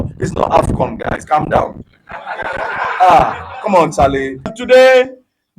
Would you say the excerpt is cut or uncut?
cut